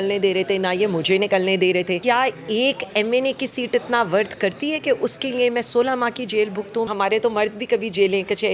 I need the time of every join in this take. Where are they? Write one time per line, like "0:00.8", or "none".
0:02.0
0:06.9